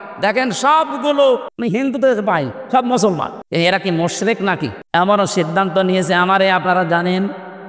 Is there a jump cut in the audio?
yes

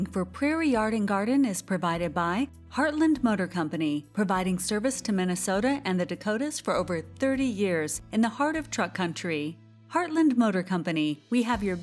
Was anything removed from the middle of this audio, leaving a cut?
no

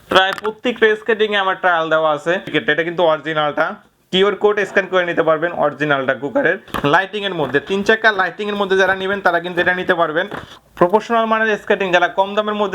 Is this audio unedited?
no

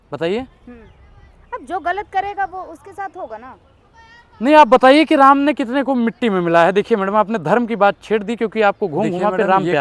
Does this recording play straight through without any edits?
yes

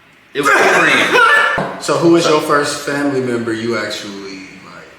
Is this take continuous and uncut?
no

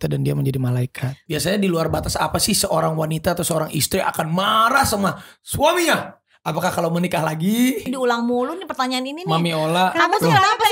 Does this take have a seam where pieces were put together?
yes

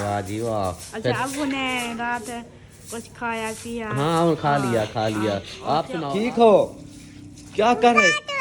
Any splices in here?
yes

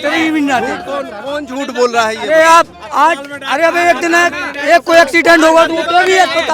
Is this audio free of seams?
yes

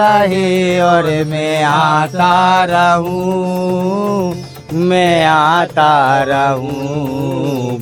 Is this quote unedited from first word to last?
yes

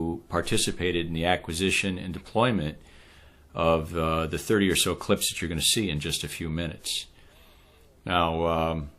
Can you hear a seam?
no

